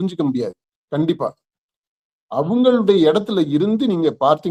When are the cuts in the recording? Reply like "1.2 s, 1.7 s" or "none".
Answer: none